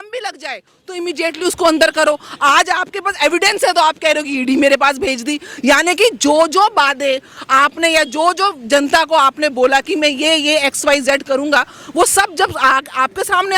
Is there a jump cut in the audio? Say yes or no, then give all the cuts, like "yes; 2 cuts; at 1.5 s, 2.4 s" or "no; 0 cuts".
no; 0 cuts